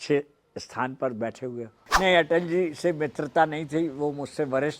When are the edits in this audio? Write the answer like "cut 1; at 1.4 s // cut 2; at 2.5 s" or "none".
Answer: cut 1; at 1.8 s